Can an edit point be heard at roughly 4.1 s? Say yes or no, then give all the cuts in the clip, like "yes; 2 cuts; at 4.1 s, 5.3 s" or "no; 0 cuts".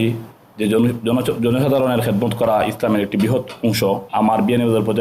yes; 1 cut; at 4.1 s